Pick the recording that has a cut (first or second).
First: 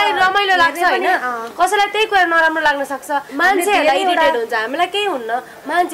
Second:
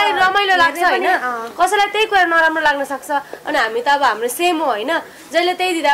first